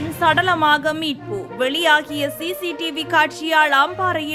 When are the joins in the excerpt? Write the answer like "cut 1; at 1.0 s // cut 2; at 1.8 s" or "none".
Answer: none